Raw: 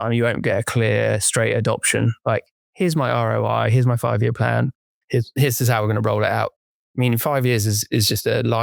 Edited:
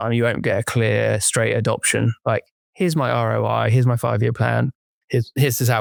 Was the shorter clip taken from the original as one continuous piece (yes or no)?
yes